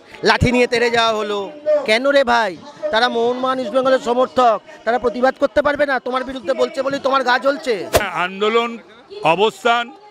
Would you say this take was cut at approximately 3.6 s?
no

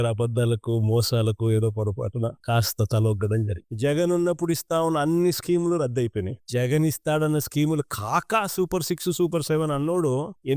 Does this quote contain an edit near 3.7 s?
yes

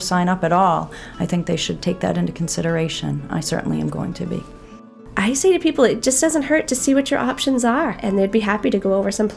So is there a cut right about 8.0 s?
yes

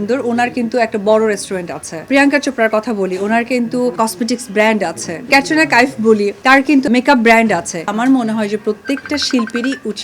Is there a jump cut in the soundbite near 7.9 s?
yes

